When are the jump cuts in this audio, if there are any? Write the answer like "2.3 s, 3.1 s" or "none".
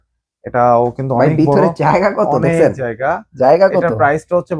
none